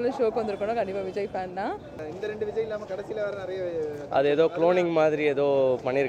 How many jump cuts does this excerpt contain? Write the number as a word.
one